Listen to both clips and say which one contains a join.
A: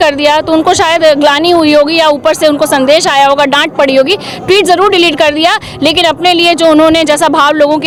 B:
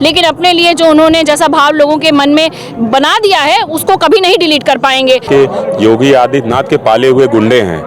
B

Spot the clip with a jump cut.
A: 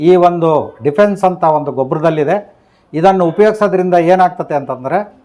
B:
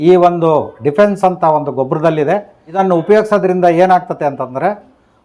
B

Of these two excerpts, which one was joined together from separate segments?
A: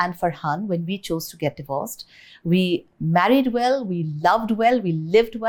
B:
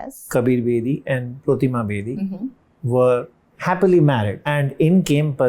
B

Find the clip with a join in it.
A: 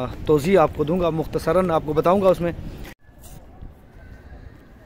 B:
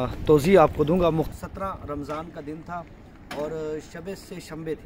B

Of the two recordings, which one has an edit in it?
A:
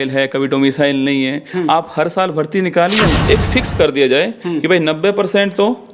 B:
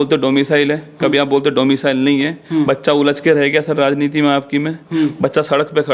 A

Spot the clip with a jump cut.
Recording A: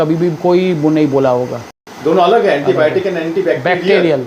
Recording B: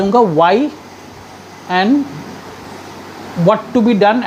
A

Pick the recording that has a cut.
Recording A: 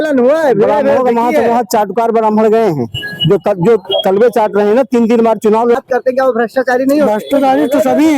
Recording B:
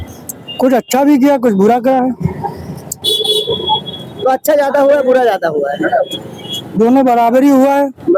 A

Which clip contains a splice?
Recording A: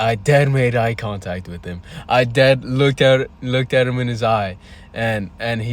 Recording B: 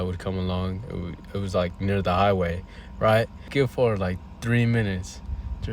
B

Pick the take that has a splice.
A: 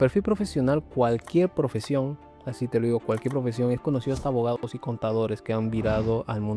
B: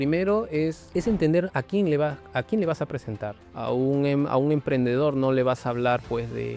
B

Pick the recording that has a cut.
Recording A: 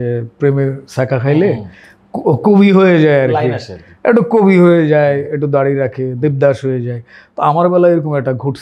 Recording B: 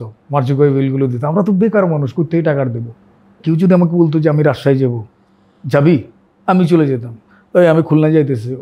B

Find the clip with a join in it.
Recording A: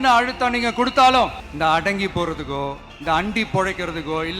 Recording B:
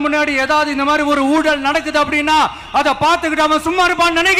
A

